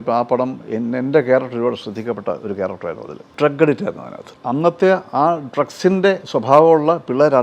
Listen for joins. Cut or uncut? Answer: cut